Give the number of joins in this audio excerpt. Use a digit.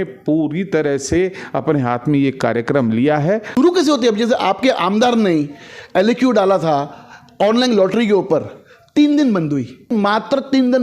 2